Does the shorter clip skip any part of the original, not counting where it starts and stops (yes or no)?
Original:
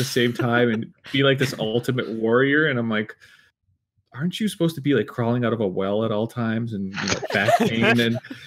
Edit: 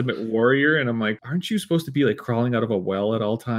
yes